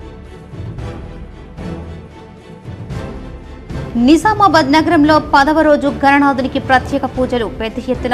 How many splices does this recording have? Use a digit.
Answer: 1